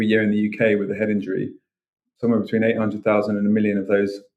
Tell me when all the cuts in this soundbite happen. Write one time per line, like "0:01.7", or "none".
none